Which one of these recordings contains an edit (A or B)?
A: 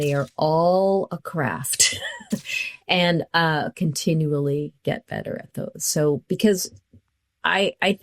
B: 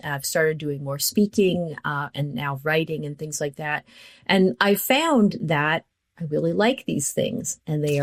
A